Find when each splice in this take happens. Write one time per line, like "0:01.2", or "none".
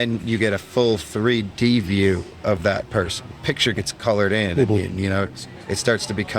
0:03.3

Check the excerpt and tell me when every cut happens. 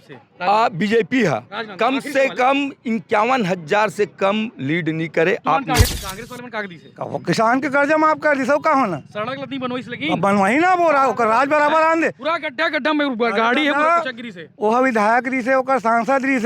0:05.9

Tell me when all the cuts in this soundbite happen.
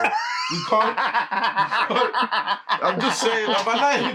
none

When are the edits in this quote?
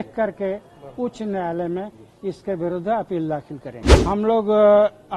0:03.8

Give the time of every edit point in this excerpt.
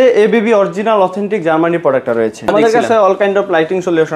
0:02.5

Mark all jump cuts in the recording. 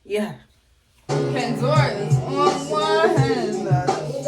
0:01.1

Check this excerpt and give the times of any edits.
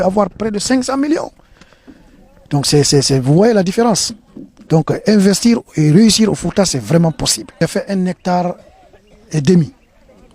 0:07.6

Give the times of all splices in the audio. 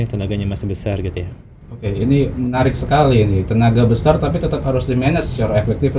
none

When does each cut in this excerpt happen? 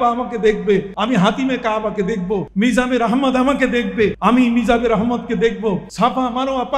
0:00.9
0:02.5
0:04.2
0:05.9

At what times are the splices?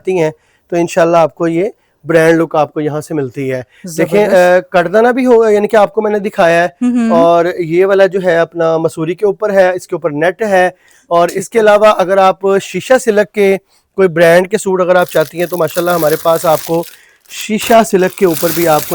none

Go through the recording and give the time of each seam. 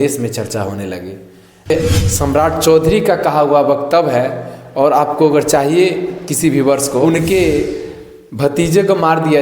0:01.7
0:07.0

